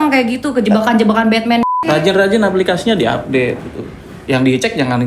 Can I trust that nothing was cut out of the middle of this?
no; 1 cut; at 1.7 s

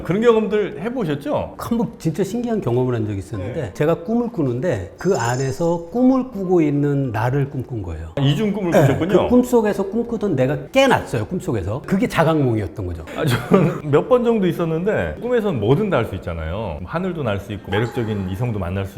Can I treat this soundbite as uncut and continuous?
no; 4 cuts; at 1.5 s, 8.2 s, 15.1 s, 17.6 s

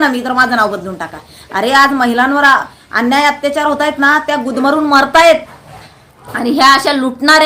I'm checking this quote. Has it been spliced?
no; 0 cuts

